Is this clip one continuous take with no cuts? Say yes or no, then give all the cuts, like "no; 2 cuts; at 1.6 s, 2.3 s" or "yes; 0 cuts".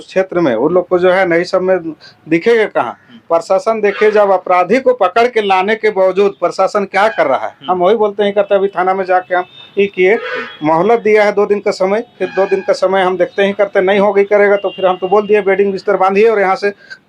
yes; 0 cuts